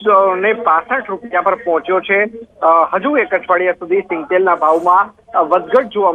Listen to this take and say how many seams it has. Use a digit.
1